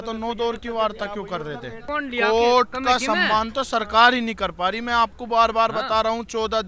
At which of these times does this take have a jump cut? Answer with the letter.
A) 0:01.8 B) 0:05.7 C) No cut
A